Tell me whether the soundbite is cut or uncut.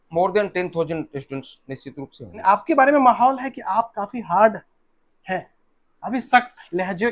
cut